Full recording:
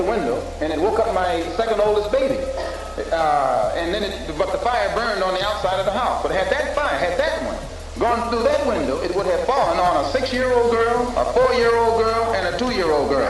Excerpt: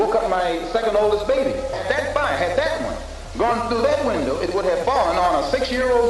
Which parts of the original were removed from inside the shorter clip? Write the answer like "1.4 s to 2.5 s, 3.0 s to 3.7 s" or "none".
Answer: 2.7 s to 6.4 s